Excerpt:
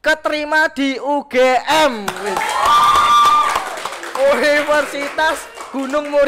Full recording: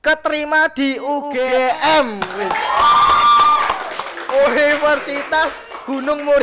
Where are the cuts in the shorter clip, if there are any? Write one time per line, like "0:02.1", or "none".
0:01.4